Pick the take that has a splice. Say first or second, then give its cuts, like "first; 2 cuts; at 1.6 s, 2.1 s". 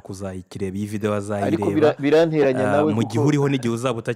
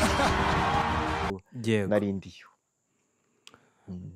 second; 1 cut; at 1.3 s